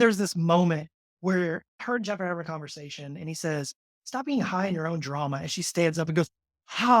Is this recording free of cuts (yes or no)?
no